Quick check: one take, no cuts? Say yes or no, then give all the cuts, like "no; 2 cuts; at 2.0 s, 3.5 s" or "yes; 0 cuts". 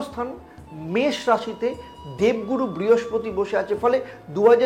yes; 0 cuts